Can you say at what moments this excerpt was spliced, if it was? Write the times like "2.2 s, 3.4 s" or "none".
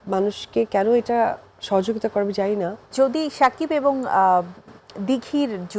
2.9 s